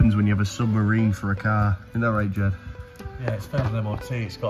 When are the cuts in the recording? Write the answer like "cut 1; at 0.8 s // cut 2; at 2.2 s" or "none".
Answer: cut 1; at 1.8 s